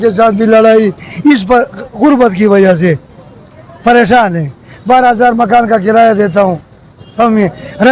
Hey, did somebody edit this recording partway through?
no; 0 cuts

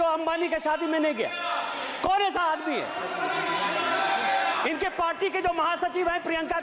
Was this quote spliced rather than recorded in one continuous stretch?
no; 0 cuts

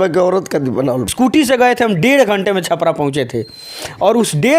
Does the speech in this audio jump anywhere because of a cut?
yes; 1 cut; at 1.1 s

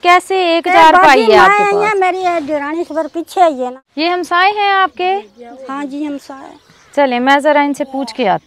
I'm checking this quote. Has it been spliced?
yes; 1 cut; at 3.8 s

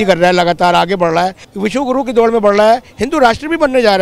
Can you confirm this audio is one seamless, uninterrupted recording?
no; 1 cut; at 1.4 s

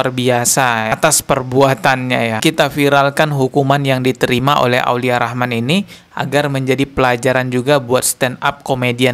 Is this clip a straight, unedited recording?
no; 1 cut; at 2.4 s

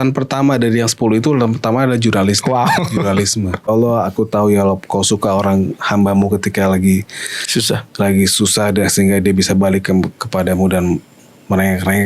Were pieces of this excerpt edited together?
yes; 1 cut; at 3.7 s

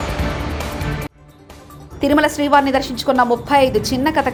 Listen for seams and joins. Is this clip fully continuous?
yes; 0 cuts

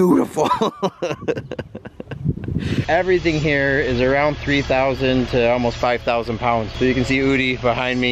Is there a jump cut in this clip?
yes; 1 cut; at 2.8 s

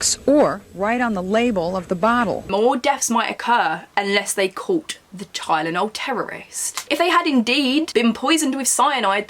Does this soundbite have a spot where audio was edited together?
yes; 2 cuts; at 2.4 s, 6.8 s

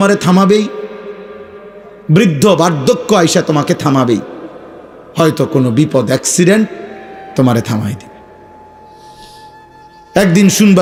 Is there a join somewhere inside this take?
no; 0 cuts

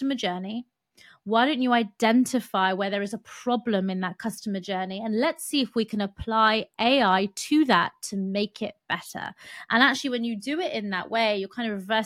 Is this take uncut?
yes; 0 cuts

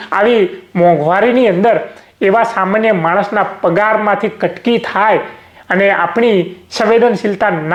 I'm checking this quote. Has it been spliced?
no; 0 cuts

